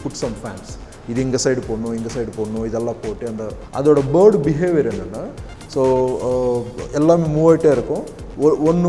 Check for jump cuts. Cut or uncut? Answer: cut